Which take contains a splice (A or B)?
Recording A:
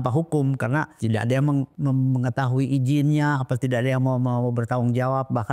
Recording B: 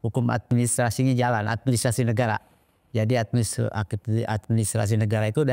A